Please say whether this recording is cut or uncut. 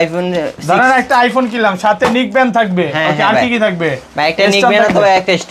uncut